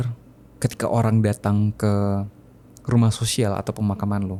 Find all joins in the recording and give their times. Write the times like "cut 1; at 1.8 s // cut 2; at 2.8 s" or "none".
none